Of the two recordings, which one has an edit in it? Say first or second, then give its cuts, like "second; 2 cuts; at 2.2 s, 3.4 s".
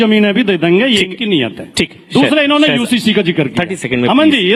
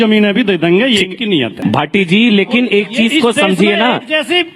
second; 1 cut; at 1.6 s